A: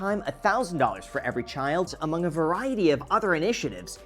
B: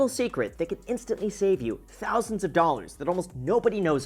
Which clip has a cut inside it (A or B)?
A